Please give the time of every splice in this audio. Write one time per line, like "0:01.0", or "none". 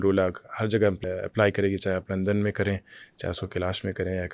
0:01.0